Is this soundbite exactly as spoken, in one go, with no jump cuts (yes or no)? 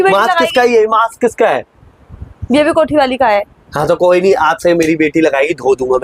yes